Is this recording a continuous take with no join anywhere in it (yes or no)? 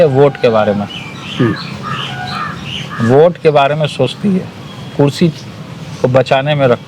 yes